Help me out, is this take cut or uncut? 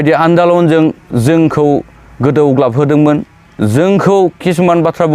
uncut